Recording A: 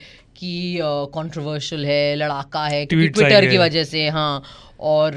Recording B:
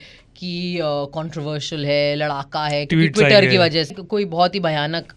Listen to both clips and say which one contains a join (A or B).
B